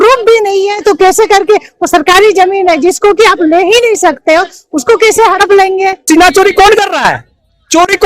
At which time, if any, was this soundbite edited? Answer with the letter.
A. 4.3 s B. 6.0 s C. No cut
B